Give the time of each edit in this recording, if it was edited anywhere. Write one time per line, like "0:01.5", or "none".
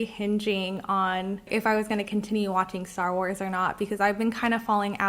0:01.4